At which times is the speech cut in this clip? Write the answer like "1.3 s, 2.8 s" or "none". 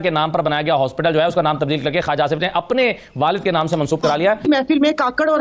4.4 s